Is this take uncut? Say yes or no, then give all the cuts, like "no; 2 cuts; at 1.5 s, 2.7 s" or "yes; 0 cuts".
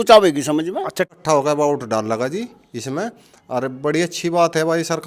no; 1 cut; at 1.1 s